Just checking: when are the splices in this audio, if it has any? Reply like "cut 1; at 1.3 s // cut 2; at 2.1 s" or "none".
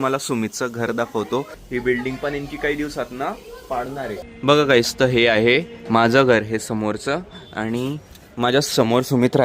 cut 1; at 1.6 s // cut 2; at 4.3 s